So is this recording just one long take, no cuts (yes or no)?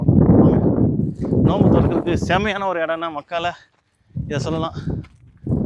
yes